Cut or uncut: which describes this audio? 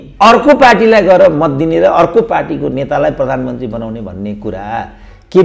uncut